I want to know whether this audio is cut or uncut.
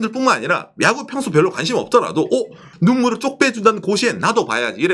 cut